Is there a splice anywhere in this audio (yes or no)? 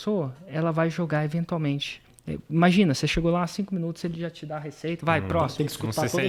no